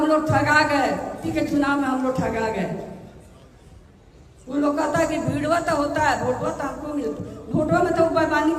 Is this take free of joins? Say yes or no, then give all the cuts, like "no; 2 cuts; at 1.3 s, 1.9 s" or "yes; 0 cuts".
no; 1 cut; at 1.3 s